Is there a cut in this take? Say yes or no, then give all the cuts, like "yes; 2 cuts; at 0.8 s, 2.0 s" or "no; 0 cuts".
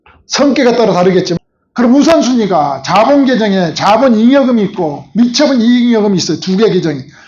yes; 1 cut; at 1.4 s